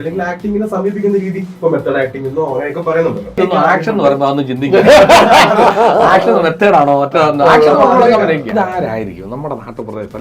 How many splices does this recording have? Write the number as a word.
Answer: two